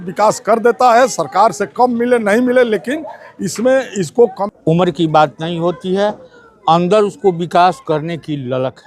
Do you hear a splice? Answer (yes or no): yes